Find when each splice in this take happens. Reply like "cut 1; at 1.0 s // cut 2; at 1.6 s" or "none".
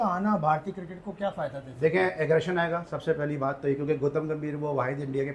none